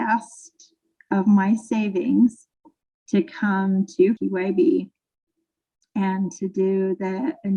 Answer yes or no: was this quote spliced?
no